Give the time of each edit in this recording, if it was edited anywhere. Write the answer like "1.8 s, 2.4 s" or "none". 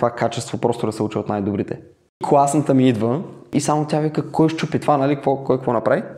2.2 s